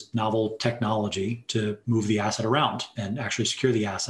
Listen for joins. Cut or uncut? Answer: cut